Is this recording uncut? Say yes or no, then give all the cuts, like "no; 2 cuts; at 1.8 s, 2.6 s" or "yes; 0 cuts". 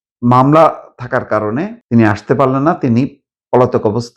no; 1 cut; at 1.8 s